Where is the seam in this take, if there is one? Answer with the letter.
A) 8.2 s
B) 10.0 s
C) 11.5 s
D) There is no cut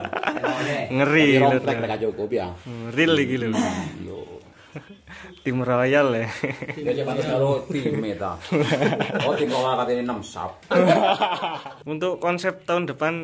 C